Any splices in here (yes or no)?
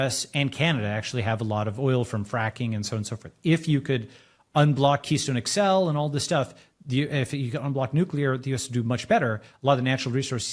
no